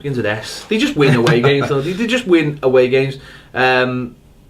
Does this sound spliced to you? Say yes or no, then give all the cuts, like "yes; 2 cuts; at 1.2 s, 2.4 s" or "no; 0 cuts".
yes; 1 cut; at 1.1 s